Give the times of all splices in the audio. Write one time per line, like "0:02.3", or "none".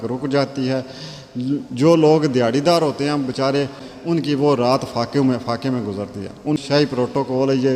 0:03.8
0:06.6